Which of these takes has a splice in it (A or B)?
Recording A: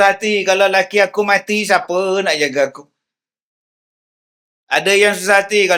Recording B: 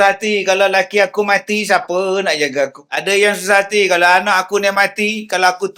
B